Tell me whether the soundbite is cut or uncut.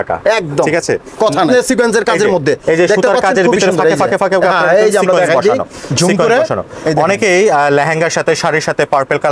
cut